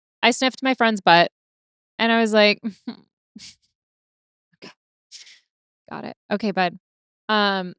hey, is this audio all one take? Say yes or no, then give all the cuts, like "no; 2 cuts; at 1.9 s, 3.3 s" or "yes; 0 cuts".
yes; 0 cuts